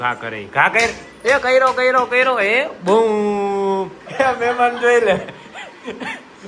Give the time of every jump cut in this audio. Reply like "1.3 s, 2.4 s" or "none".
4.0 s